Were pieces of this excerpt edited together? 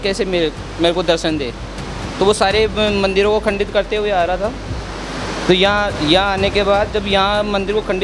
no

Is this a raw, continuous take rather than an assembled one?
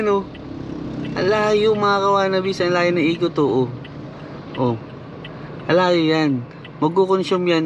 yes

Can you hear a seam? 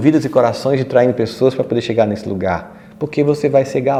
no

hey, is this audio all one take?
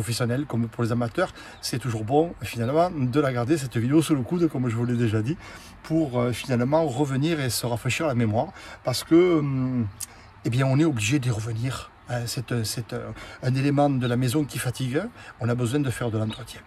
yes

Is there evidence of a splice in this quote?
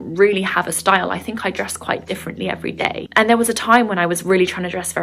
yes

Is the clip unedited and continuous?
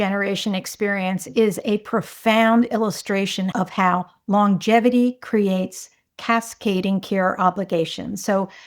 no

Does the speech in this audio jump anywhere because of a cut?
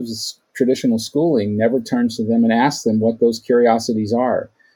no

